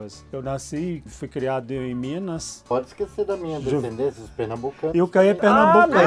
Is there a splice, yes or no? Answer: yes